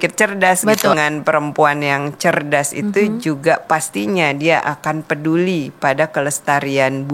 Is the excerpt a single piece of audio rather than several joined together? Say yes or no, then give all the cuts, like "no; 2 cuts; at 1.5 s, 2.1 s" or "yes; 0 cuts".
no; 1 cut; at 0.9 s